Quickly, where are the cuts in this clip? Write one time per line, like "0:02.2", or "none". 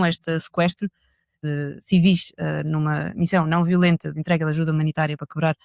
0:01.4